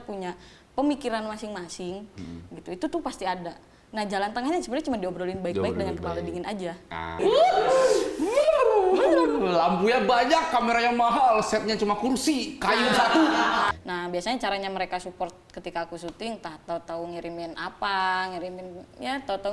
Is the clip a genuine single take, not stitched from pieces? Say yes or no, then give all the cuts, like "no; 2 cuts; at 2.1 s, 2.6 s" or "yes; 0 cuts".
no; 2 cuts; at 7.2 s, 13.7 s